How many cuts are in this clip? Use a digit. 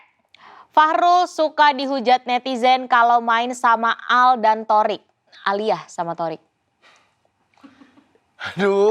0